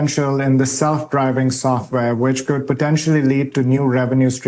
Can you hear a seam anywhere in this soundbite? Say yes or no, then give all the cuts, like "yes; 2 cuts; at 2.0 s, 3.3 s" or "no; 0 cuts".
no; 0 cuts